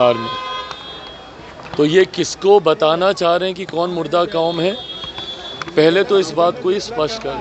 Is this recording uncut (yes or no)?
yes